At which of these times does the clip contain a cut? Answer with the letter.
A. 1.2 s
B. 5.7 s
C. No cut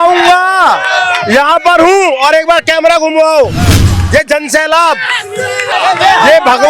B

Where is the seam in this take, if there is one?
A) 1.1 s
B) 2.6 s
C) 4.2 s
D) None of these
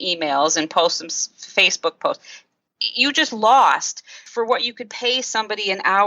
C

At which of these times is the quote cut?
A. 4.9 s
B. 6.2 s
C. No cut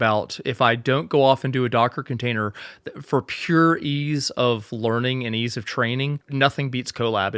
B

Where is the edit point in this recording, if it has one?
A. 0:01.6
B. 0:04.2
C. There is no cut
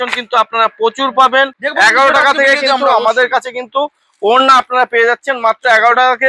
A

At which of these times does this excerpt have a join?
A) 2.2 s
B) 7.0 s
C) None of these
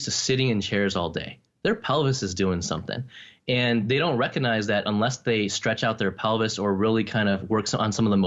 C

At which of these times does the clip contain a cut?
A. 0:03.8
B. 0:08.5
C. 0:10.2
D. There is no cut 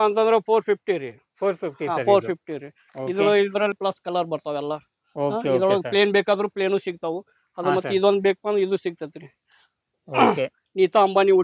A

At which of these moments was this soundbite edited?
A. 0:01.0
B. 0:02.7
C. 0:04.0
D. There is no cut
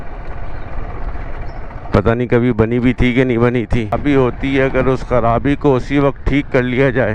C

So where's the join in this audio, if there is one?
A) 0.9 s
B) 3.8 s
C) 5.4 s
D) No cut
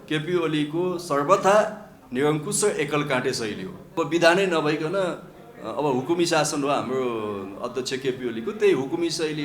B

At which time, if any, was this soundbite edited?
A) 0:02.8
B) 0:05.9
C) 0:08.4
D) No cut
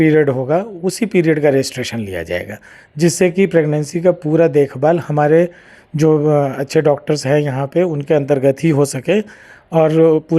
D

